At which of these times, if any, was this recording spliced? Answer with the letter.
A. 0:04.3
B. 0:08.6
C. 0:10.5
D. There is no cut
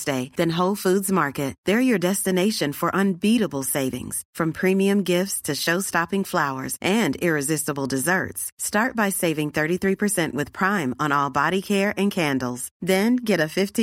D